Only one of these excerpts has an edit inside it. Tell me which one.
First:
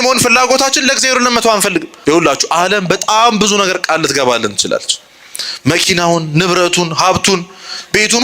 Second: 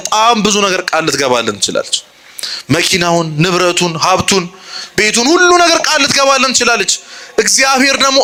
first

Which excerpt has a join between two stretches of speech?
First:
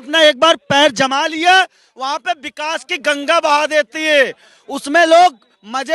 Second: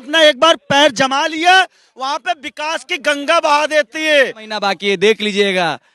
second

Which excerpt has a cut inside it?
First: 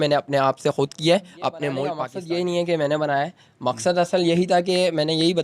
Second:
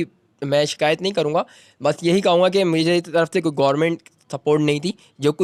first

